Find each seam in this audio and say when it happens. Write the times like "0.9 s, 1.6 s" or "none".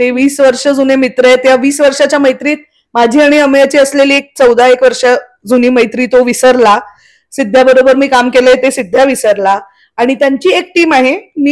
none